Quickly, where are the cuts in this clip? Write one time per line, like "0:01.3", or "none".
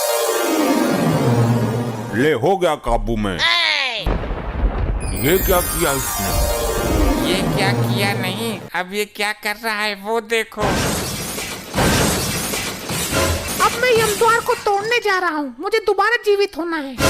0:04.1
0:13.4